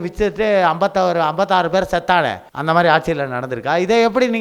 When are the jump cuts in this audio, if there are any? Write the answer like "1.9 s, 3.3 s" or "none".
2.5 s